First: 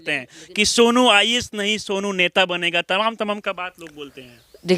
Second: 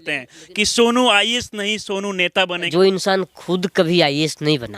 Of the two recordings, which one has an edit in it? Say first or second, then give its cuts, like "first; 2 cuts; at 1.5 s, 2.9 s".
second; 1 cut; at 2.7 s